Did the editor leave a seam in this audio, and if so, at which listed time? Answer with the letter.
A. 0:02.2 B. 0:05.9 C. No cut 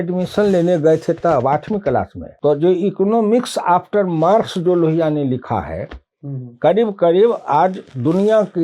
A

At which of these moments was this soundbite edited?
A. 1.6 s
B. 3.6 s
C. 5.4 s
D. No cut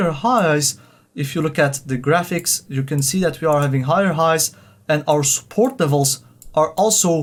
D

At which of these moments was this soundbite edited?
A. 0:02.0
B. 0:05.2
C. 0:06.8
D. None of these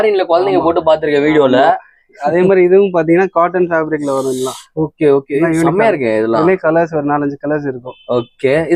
D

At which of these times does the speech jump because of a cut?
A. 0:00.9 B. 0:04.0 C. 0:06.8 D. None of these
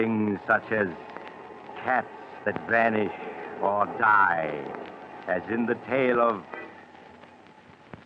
B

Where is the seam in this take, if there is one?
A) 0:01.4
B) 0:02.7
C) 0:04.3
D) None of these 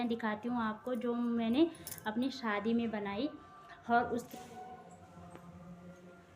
C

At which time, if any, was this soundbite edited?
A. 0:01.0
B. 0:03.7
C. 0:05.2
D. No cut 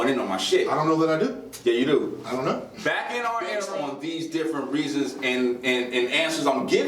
B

